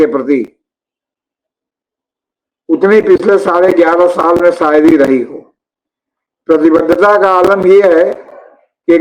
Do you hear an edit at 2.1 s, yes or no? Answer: no